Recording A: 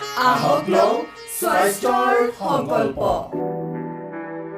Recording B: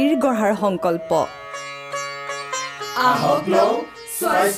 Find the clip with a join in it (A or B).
A